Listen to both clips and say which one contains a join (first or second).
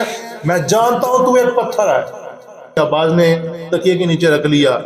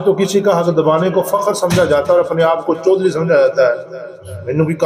first